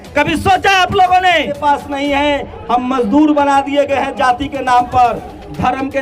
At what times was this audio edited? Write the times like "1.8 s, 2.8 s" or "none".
1.6 s